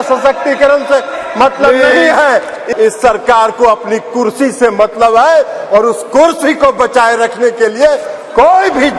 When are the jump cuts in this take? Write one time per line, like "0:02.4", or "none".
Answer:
0:02.6